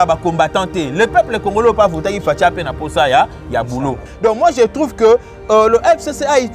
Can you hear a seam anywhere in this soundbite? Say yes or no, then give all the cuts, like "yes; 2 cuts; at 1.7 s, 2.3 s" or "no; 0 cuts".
yes; 1 cut; at 4.1 s